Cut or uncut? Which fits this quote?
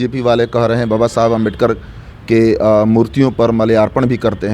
uncut